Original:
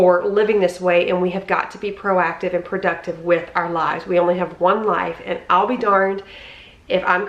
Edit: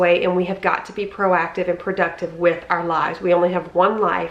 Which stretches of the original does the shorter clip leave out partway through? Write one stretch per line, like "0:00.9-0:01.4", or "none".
none